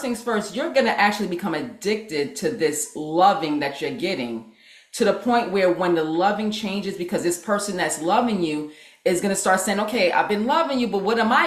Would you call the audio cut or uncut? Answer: uncut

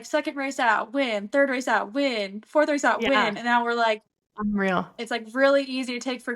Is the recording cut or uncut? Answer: cut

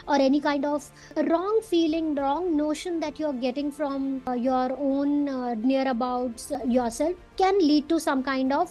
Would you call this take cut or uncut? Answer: uncut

